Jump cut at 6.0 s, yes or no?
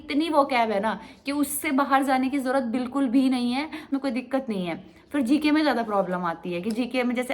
no